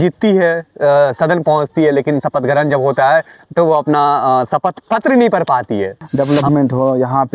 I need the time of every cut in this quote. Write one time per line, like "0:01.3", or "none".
0:06.0